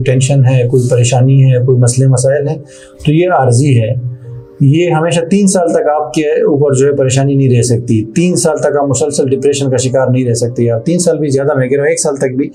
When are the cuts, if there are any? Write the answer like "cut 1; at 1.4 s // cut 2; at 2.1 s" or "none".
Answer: none

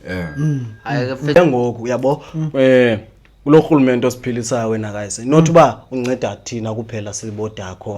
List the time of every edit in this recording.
cut 1; at 1.4 s

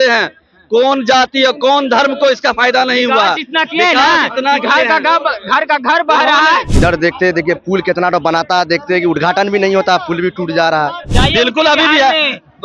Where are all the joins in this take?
cut 1; at 6.7 s // cut 2; at 11.1 s

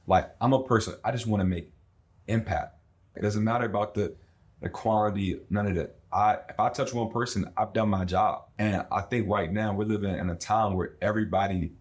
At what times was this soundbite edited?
cut 1; at 3.1 s // cut 2; at 8.5 s

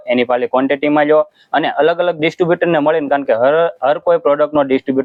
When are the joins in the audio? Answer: none

